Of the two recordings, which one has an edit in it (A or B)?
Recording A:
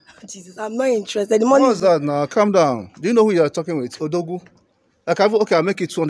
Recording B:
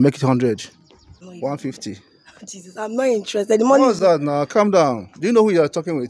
B